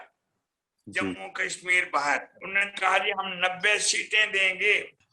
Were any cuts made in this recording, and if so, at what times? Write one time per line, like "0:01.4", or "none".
0:02.4